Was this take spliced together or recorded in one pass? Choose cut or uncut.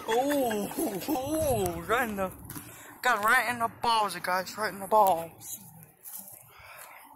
uncut